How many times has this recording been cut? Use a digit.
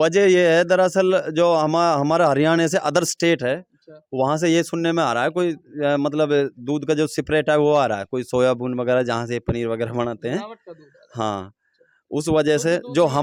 0